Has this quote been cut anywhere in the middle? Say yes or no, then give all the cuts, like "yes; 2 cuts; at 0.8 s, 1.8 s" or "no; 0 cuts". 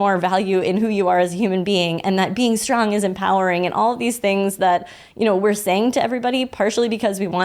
no; 0 cuts